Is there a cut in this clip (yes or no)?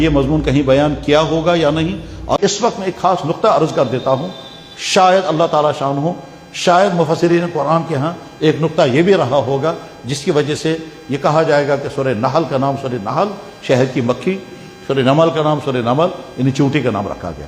yes